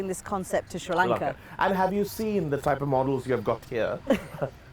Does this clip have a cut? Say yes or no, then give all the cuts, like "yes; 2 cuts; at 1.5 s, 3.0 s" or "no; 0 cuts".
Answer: no; 0 cuts